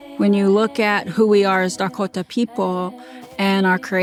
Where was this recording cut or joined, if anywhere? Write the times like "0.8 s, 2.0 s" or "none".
none